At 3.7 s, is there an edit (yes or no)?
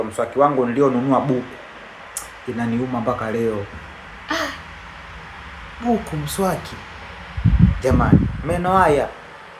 no